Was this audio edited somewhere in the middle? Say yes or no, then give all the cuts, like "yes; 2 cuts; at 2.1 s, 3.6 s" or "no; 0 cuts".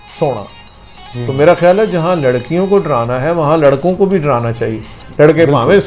no; 0 cuts